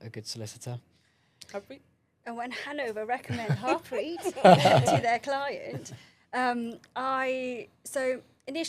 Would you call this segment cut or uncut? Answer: uncut